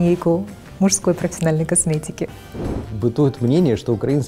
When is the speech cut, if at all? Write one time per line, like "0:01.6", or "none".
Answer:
0:02.8